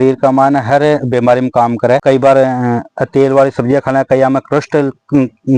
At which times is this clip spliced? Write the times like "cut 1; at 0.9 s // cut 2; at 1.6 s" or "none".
none